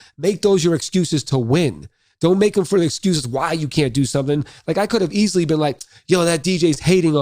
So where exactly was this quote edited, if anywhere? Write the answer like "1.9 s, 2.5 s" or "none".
none